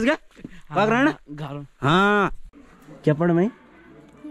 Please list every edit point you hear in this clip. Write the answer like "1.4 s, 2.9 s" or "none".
2.4 s